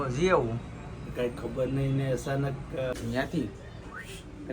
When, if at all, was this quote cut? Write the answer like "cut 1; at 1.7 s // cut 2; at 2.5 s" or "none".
cut 1; at 2.9 s